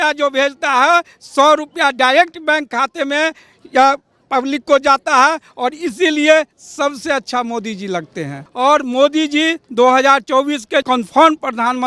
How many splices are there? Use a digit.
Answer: 2